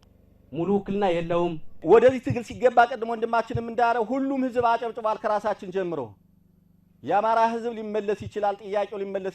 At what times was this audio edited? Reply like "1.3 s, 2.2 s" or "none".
1.8 s